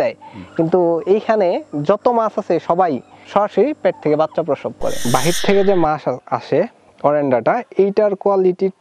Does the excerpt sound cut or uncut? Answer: cut